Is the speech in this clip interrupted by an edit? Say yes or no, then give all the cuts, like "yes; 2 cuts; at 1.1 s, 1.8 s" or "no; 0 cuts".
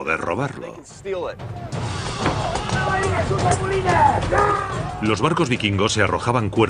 no; 0 cuts